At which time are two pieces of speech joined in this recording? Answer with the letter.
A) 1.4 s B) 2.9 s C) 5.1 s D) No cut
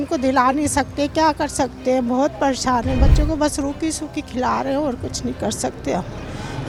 D